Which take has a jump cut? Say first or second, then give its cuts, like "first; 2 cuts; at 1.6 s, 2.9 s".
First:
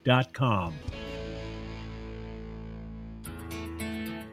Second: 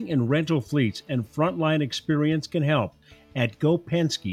first; 1 cut; at 3.2 s